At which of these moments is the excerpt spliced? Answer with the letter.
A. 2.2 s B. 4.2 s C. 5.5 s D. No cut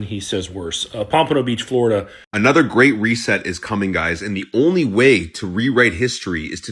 A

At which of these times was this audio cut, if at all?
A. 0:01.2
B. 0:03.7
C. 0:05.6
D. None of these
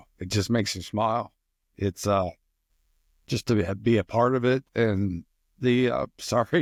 D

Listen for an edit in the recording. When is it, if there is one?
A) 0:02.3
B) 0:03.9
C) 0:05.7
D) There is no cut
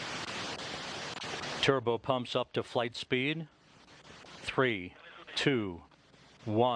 A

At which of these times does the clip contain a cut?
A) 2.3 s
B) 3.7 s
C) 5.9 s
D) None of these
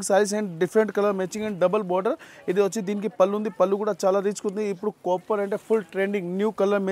D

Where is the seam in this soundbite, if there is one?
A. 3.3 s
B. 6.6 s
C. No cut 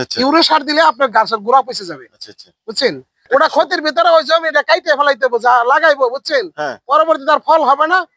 A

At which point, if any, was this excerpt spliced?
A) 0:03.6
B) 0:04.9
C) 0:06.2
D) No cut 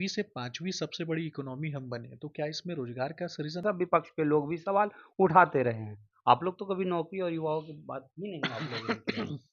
A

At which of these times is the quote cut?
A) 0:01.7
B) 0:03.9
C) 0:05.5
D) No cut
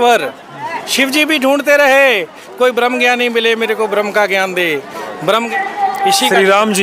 C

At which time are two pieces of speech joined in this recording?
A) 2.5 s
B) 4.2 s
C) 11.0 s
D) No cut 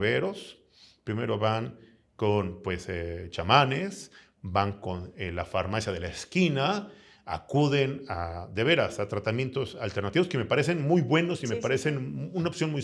D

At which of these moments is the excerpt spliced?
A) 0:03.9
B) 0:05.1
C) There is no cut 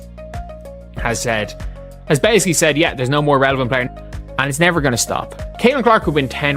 A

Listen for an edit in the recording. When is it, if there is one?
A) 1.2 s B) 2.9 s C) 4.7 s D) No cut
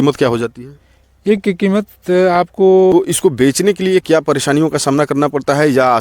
B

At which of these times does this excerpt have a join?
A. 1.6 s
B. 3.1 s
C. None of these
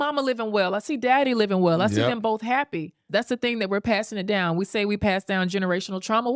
B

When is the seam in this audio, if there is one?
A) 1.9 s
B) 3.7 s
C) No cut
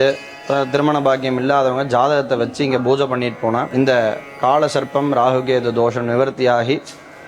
B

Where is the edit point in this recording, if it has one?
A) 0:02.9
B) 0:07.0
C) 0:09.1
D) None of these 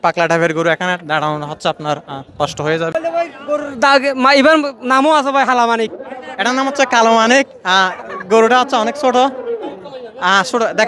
A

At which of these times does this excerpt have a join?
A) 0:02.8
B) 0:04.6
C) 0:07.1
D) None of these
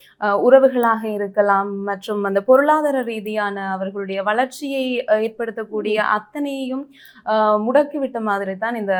D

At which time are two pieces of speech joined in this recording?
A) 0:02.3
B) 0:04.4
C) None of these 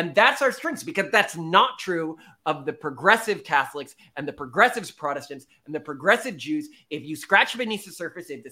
C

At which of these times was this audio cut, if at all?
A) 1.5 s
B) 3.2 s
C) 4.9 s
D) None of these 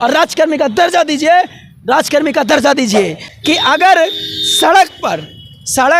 B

